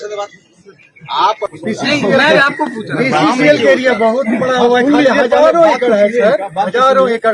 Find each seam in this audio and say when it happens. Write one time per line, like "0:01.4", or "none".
0:01.5